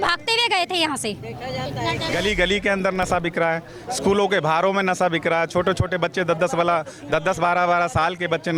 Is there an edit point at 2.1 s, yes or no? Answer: yes